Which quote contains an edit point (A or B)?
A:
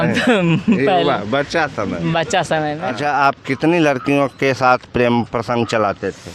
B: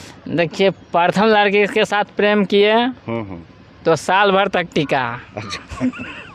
A